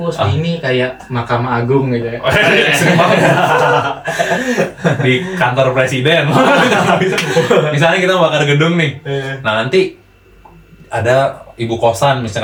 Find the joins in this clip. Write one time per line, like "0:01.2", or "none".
none

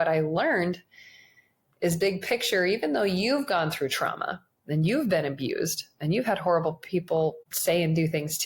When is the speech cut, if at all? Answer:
0:07.5

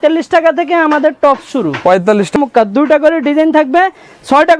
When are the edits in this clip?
0:02.3

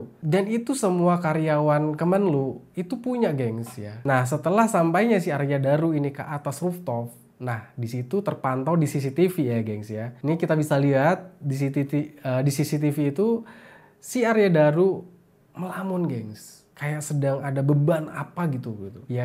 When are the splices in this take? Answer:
0:03.9

